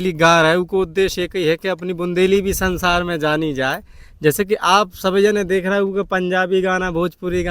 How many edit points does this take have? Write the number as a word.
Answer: zero